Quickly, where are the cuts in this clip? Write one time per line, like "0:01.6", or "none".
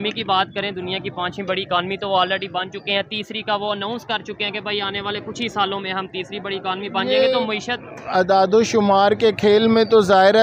none